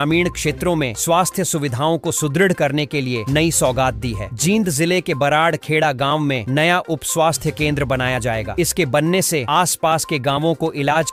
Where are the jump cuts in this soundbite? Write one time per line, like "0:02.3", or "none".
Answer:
none

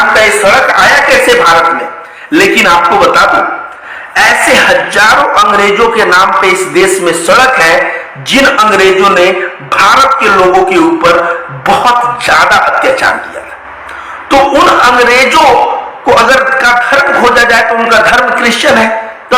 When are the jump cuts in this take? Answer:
none

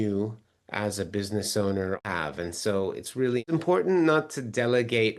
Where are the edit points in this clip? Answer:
0:02.0
0:03.4

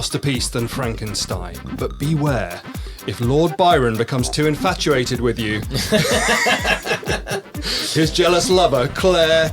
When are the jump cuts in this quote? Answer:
0:01.7

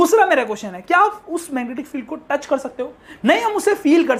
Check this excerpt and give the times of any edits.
none

